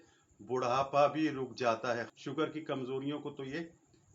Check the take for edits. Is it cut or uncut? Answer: cut